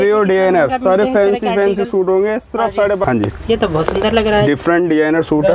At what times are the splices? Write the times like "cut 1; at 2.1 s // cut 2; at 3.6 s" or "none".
cut 1; at 3.0 s